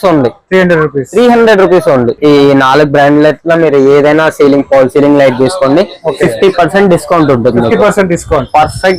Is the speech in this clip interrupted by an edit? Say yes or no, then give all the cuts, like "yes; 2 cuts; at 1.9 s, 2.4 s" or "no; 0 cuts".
yes; 1 cut; at 2.1 s